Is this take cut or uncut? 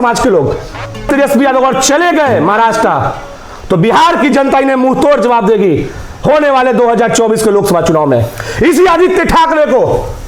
cut